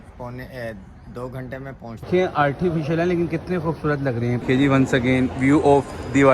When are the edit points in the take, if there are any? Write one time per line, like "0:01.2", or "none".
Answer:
0:02.1